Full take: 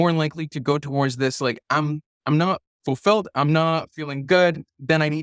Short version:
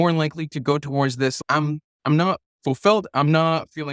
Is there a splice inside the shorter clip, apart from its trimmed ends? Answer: yes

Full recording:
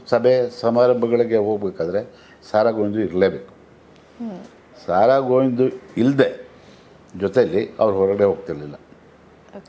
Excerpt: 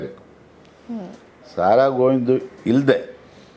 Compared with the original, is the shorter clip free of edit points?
yes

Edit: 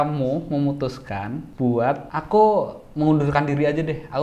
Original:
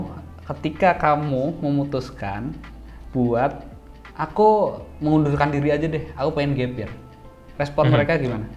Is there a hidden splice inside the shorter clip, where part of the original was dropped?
yes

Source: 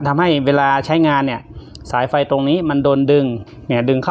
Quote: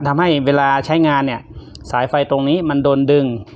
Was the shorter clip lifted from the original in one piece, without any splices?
yes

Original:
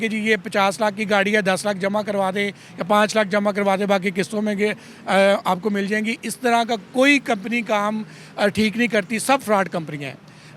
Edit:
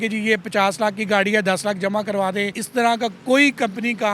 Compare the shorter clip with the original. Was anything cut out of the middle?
yes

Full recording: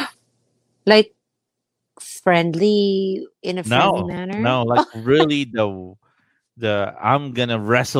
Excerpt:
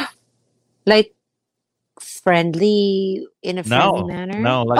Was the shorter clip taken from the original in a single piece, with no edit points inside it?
yes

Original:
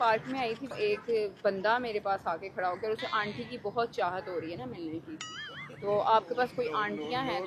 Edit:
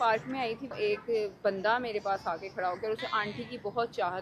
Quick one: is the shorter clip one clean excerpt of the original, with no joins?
yes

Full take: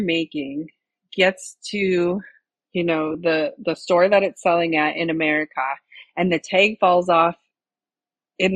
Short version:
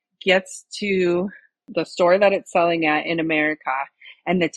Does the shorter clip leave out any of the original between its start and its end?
yes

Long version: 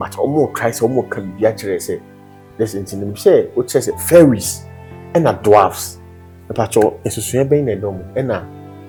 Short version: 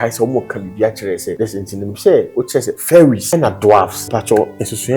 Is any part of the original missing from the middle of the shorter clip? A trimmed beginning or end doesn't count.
yes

